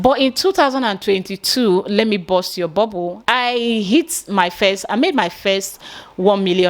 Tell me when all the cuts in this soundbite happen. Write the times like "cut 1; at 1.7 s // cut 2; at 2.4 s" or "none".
cut 1; at 3.1 s